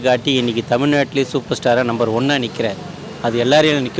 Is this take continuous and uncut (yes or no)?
yes